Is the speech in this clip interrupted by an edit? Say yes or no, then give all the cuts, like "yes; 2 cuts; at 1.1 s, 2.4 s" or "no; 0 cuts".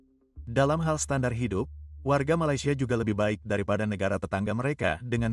no; 0 cuts